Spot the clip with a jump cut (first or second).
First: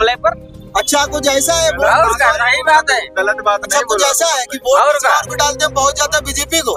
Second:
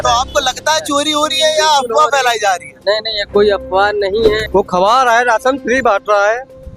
second